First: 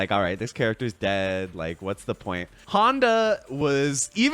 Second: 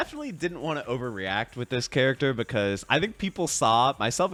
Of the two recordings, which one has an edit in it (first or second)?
first